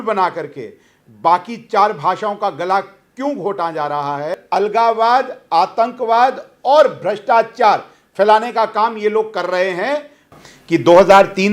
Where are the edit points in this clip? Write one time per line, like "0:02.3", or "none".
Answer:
0:04.4
0:10.3